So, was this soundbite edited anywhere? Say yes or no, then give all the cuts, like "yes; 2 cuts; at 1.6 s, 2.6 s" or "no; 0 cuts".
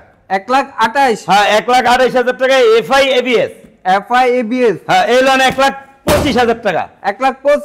no; 0 cuts